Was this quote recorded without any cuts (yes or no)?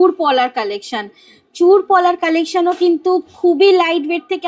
yes